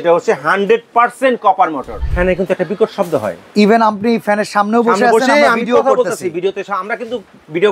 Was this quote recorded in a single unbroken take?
no; 1 cut; at 1.9 s

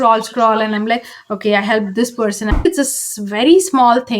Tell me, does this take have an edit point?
yes; 1 cut; at 2.6 s

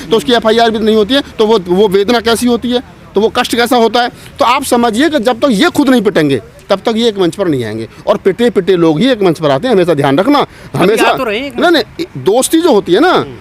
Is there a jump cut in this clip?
no; 0 cuts

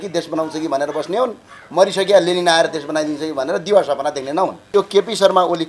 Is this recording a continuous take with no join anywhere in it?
no; 1 cut; at 4.6 s

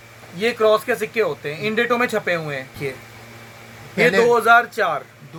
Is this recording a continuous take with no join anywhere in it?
yes; 0 cuts

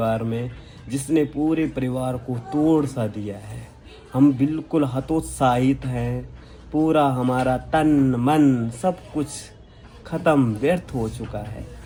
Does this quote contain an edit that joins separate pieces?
no; 0 cuts

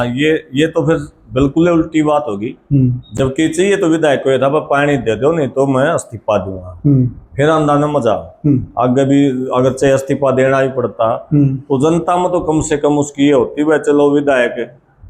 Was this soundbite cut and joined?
no; 0 cuts

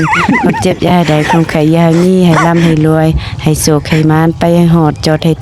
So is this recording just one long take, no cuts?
yes; 0 cuts

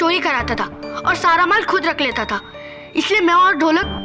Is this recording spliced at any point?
no; 0 cuts

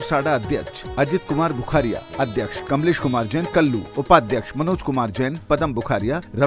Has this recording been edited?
yes; 2 cuts; at 2.6 s, 3.9 s

